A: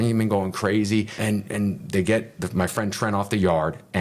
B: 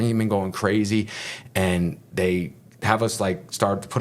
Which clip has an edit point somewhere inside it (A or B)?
A